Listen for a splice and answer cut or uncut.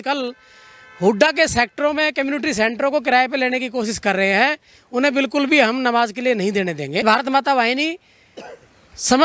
cut